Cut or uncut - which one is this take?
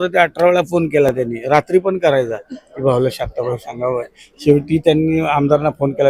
uncut